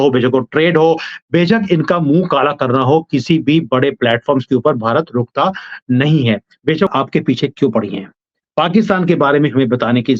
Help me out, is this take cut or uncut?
cut